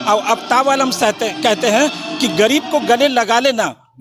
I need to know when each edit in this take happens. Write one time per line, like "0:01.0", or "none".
none